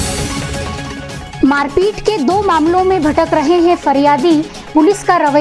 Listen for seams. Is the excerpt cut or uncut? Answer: cut